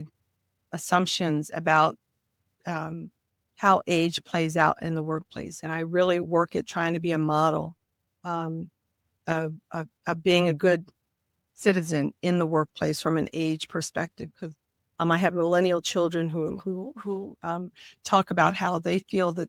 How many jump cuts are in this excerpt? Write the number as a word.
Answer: zero